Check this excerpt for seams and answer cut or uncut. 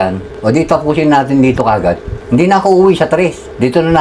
uncut